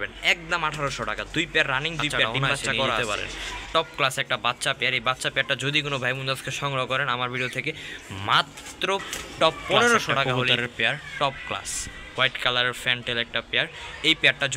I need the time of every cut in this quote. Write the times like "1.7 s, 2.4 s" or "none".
3.0 s, 10.2 s